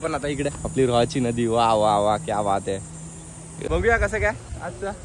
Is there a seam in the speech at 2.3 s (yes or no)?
no